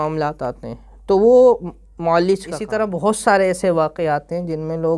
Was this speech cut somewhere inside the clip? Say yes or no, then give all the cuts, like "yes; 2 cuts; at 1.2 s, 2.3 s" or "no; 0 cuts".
yes; 1 cut; at 2.7 s